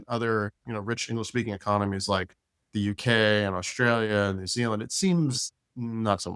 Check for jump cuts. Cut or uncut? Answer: uncut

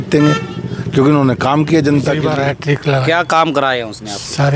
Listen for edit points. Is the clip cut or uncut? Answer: cut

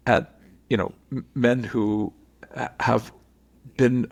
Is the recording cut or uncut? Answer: uncut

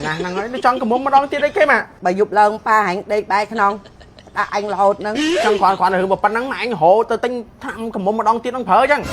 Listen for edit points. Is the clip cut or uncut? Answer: cut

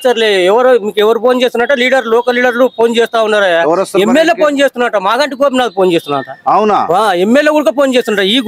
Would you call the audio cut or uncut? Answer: uncut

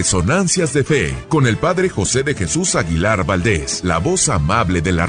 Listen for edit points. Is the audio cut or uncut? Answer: cut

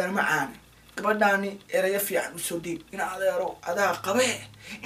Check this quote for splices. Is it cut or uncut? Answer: uncut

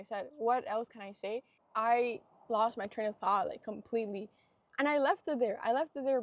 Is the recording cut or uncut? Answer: cut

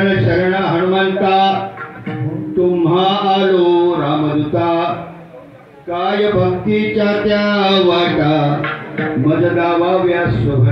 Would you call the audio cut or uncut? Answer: uncut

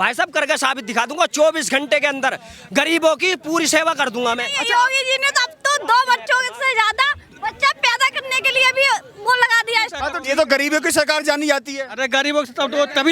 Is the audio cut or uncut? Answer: cut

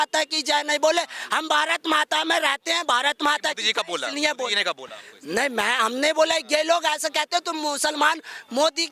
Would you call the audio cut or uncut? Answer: uncut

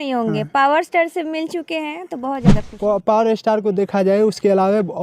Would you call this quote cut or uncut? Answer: cut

